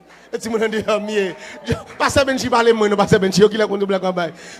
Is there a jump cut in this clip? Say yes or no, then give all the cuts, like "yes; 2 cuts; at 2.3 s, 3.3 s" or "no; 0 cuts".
no; 0 cuts